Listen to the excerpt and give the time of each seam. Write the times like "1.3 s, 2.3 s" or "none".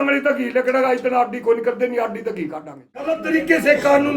3.2 s